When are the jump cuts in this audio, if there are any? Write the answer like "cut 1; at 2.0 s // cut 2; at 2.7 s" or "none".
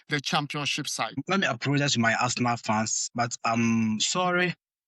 cut 1; at 1.2 s

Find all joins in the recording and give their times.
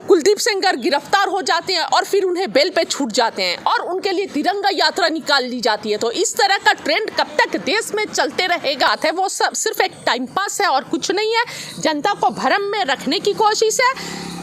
cut 1; at 8.9 s

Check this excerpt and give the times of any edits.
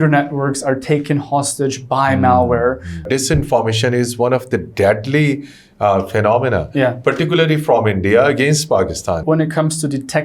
cut 1; at 3.1 s // cut 2; at 9.2 s

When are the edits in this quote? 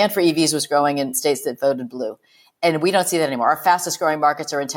cut 1; at 1.2 s

